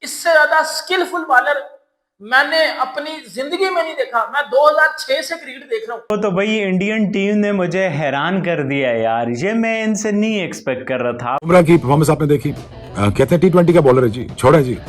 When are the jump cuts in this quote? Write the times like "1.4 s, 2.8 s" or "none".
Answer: 6.0 s, 11.4 s